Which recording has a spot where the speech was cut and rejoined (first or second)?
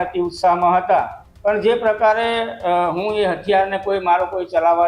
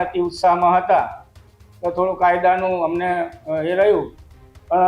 first